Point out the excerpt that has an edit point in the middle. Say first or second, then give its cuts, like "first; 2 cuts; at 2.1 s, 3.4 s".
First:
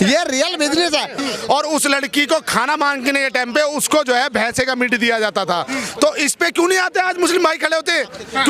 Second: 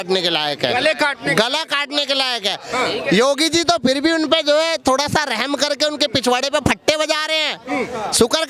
first; 1 cut; at 1.1 s